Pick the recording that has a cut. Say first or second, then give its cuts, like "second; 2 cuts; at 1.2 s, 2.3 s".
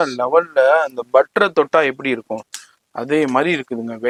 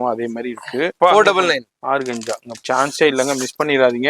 second; 2 cuts; at 0.9 s, 2.5 s